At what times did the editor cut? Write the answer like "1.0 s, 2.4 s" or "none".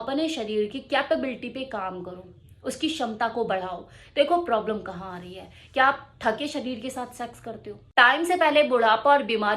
7.7 s